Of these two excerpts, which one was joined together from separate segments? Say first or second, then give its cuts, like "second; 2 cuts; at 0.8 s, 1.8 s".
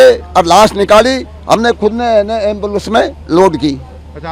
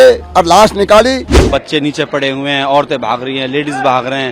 second; 1 cut; at 1.4 s